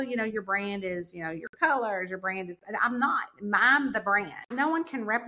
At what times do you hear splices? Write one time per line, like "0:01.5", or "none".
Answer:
0:04.4